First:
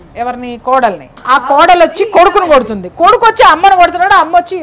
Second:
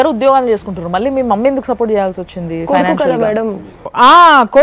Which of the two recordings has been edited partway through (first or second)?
first